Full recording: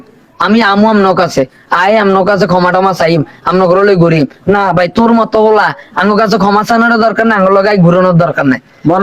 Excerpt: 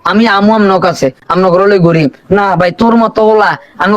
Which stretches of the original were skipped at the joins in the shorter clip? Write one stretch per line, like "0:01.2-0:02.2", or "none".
0:01.6-0:03.4